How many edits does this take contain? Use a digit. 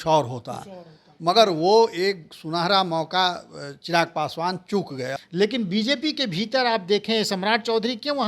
1